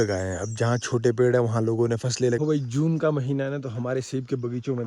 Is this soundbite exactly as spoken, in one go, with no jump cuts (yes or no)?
no